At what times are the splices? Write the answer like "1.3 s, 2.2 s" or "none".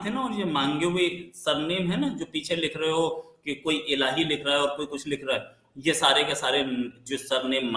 none